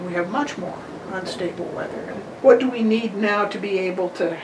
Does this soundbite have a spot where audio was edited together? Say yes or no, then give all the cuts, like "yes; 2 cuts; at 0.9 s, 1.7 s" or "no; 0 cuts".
yes; 1 cut; at 2.2 s